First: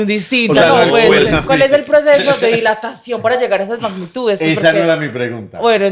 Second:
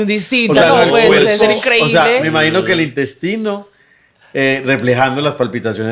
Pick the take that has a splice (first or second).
first